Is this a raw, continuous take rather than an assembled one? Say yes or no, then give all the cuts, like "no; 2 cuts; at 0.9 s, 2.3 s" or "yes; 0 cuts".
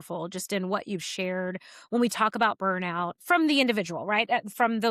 yes; 0 cuts